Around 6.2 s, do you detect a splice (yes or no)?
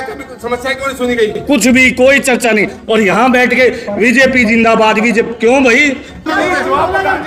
yes